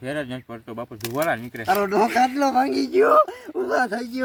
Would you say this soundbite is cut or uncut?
uncut